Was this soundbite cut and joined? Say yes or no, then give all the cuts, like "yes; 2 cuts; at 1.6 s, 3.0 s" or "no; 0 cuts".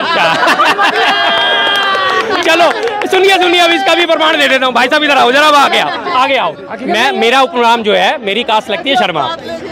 yes; 1 cut; at 6.7 s